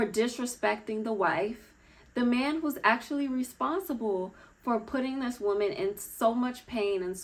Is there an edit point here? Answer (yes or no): no